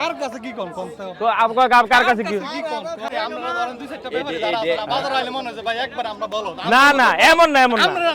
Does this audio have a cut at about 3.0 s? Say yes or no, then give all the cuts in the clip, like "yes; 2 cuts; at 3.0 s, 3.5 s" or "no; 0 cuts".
yes; 1 cut; at 3.0 s